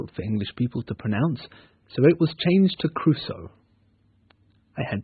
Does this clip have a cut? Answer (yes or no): no